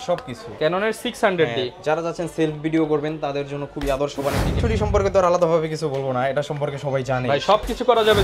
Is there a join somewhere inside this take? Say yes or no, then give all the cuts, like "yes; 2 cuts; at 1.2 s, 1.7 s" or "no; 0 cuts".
yes; 1 cut; at 4.5 s